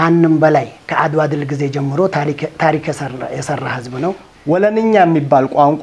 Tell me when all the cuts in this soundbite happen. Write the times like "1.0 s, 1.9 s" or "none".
4.3 s